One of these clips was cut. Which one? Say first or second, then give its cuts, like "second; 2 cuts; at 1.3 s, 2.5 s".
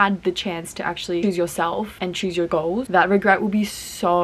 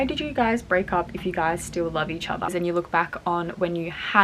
second; 1 cut; at 2.5 s